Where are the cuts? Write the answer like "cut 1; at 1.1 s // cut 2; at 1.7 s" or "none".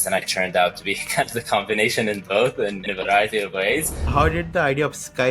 cut 1; at 4.1 s